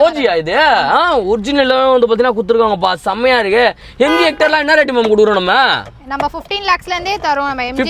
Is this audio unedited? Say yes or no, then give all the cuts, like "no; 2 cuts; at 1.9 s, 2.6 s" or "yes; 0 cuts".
yes; 0 cuts